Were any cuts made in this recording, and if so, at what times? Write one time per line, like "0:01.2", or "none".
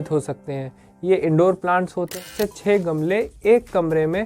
0:02.2